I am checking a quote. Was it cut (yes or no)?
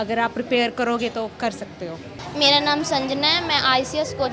no